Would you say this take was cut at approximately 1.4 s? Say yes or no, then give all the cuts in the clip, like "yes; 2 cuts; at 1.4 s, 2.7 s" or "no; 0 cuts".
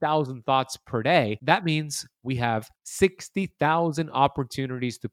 yes; 2 cuts; at 1.4 s, 2.8 s